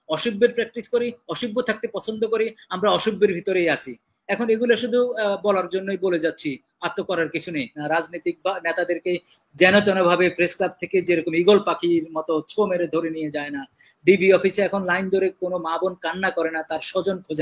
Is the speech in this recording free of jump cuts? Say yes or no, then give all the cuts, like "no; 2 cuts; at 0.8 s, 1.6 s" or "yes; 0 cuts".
no; 1 cut; at 7.8 s